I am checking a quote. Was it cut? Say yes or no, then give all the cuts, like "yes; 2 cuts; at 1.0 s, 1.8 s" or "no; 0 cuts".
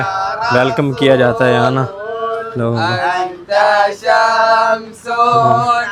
no; 0 cuts